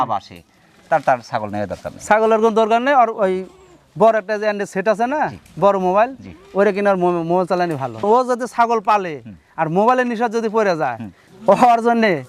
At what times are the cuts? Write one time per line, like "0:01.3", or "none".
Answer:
none